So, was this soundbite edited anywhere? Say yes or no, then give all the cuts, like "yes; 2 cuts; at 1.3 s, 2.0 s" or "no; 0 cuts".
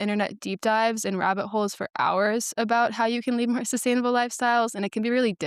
no; 0 cuts